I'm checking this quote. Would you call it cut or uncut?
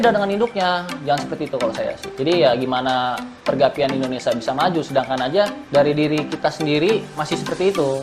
cut